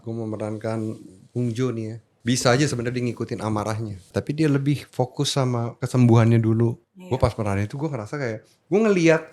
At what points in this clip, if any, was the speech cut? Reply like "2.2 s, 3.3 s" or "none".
2.0 s, 4.1 s, 5.8 s, 6.9 s